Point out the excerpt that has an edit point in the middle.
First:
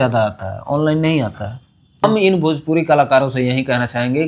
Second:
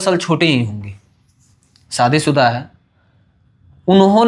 first; 1 cut; at 2.0 s

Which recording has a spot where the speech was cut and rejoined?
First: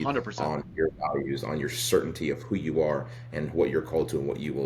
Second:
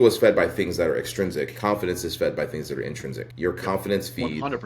second; 2 cuts; at 1.5 s, 3.2 s

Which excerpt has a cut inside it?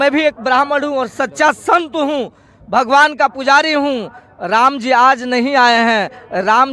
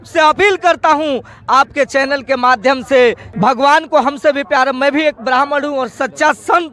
second; 1 cut; at 3.3 s

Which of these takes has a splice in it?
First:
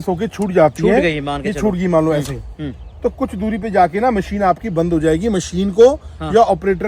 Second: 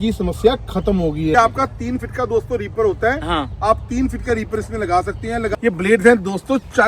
second; 2 cuts; at 1.3 s, 5.5 s

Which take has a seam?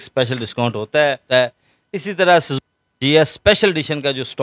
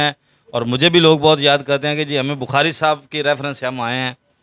first; 1 cut; at 1.3 s

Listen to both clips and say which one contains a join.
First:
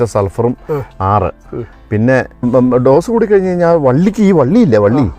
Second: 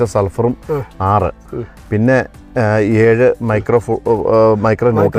first; 1 cut; at 2.5 s

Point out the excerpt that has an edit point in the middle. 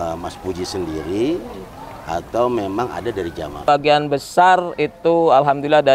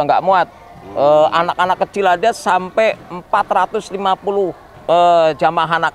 first; 1 cut; at 3.7 s

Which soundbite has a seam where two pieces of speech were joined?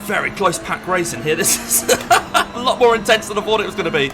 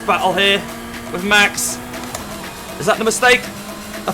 second; 1 cut; at 2.4 s

